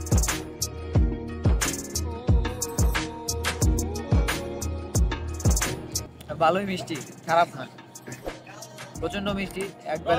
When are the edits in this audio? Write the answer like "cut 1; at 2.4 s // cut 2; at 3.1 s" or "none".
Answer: none